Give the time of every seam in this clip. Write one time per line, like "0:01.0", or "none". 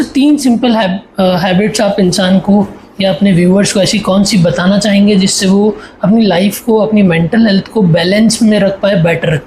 none